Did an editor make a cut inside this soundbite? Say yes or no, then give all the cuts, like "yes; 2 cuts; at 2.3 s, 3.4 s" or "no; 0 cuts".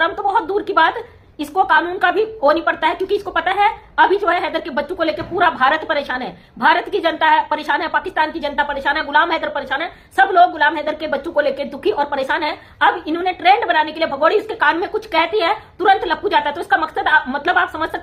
no; 0 cuts